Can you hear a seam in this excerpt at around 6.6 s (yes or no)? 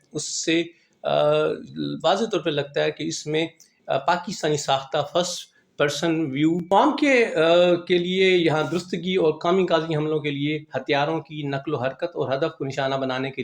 yes